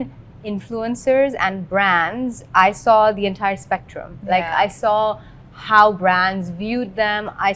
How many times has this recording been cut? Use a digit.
0